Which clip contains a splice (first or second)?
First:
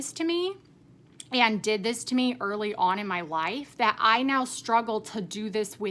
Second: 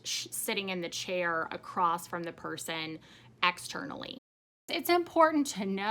second